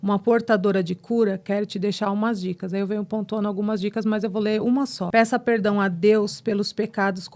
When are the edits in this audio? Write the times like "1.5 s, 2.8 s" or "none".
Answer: 5.0 s